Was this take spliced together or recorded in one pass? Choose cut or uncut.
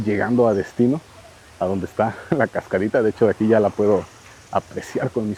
uncut